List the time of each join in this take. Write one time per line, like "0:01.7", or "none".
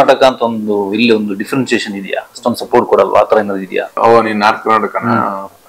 0:04.0

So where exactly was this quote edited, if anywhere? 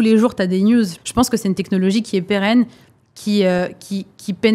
0:00.9

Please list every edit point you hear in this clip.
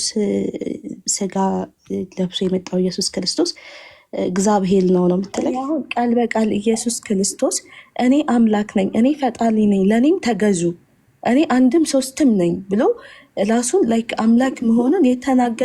0:05.6

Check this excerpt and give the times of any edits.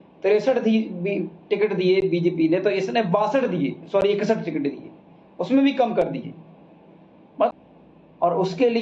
0:07.5

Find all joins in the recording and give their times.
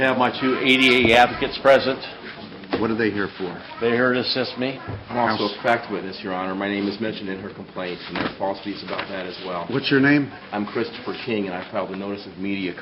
none

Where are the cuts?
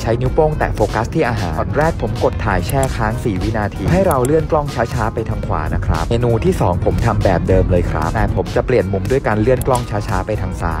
none

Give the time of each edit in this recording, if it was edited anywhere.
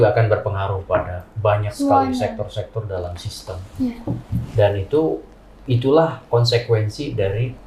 none

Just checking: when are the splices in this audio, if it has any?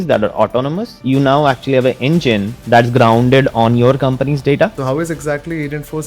0:00.9
0:04.8

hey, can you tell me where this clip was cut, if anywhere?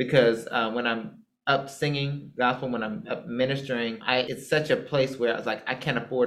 none

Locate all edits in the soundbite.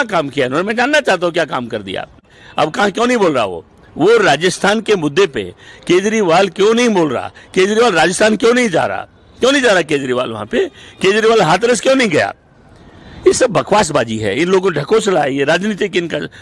0:02.4

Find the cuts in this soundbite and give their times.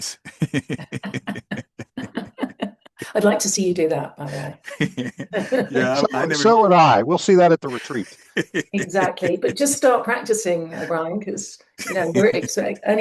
none

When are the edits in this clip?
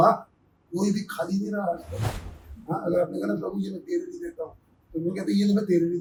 none

